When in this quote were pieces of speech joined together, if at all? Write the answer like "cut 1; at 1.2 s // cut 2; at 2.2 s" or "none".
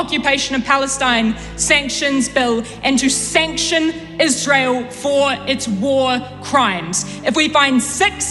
none